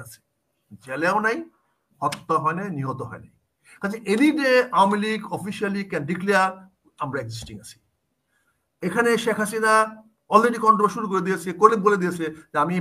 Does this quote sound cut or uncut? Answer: uncut